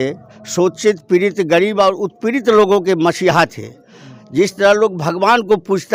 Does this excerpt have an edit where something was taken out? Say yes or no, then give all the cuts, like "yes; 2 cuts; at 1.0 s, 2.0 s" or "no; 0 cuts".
no; 0 cuts